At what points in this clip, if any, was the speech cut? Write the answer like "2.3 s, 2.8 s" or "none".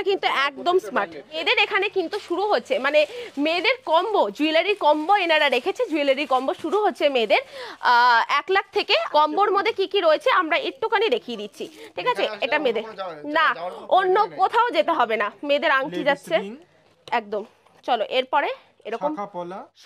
1.4 s, 9.1 s